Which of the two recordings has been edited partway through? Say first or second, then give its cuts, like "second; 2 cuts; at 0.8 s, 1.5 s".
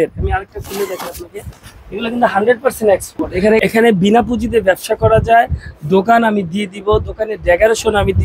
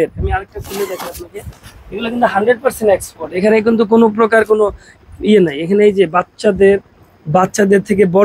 first; 1 cut; at 3.6 s